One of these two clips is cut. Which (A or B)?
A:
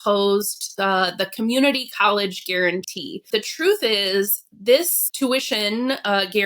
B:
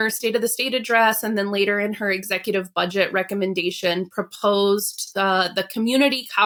A